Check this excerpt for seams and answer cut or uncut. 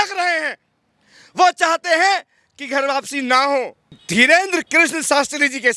cut